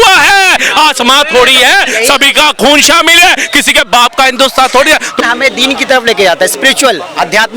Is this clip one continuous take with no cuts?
no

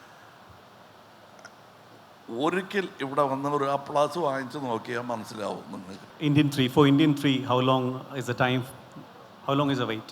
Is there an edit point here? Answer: yes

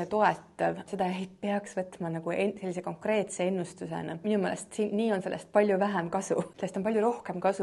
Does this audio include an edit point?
yes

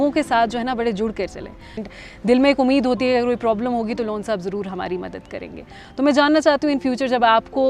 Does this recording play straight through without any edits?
no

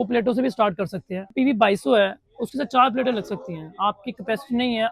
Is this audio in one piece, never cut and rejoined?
no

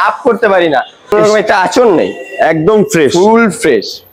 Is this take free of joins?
no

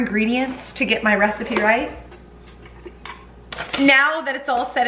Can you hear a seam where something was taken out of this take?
yes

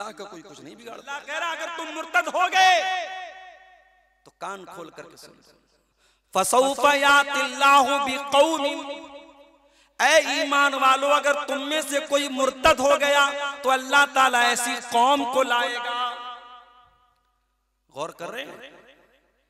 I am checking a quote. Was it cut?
yes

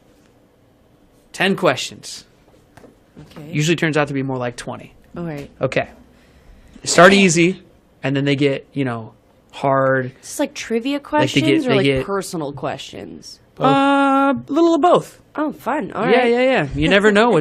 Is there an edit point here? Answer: no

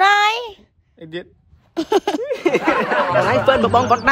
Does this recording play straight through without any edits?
no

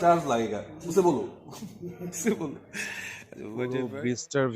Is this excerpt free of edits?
no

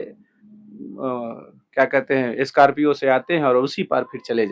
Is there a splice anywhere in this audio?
no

